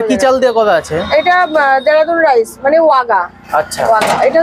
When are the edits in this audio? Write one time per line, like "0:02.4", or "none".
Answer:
none